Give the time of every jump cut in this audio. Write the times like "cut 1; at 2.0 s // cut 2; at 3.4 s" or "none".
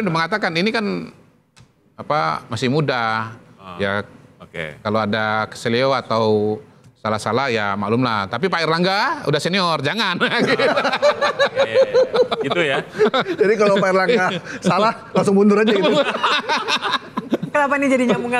none